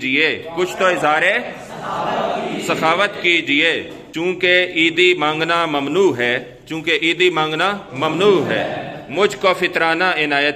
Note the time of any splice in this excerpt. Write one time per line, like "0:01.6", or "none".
0:04.0

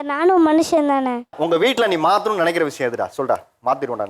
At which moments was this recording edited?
0:01.3

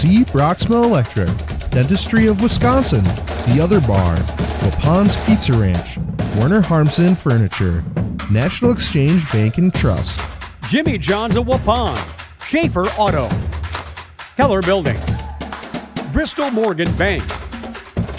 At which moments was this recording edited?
0:17.3

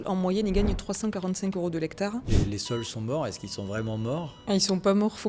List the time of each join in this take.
0:02.4
0:04.4

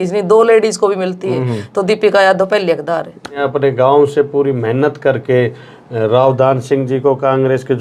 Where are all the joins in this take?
0:03.4

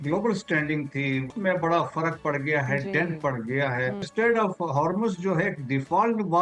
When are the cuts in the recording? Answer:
0:01.3
0:04.1

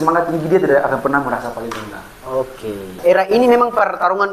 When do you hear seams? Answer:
0:03.0

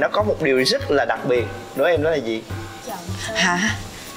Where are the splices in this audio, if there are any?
0:02.8

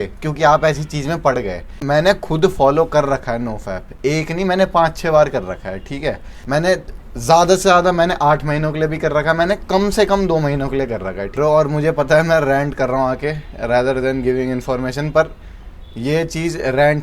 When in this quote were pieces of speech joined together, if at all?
0:01.7
0:06.3
0:11.3

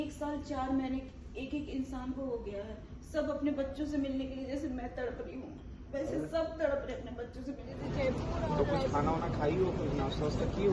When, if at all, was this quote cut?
0:07.8

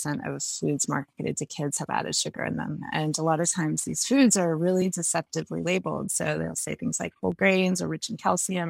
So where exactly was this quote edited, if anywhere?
none

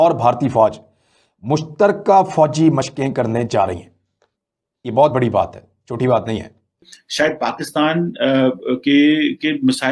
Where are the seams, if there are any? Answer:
0:07.0

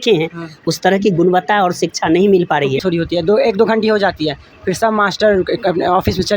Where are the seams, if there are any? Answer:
0:02.8

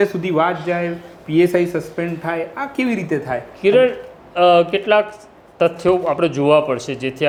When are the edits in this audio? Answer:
none

